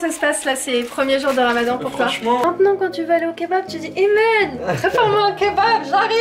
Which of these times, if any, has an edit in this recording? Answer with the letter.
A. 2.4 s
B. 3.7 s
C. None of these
A